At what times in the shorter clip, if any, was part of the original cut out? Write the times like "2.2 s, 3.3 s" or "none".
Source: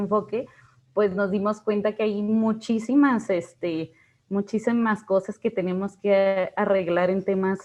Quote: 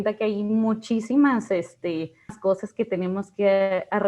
2.4 s